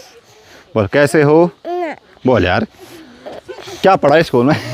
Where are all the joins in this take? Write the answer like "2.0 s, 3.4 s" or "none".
none